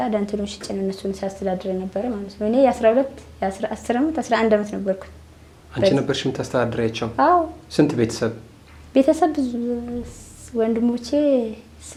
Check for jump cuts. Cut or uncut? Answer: uncut